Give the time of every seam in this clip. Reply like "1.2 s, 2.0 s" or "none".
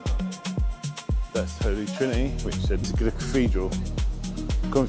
2.8 s